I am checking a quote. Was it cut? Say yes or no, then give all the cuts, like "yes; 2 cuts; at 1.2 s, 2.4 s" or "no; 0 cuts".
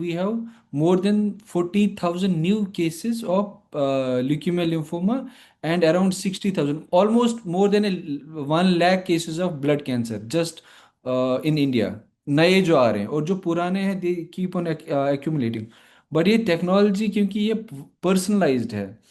no; 0 cuts